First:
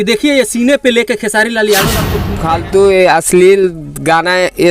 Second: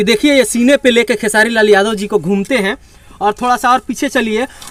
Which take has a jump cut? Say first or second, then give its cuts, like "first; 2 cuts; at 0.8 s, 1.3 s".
first; 1 cut; at 2.2 s